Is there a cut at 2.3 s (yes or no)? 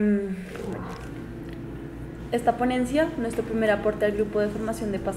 no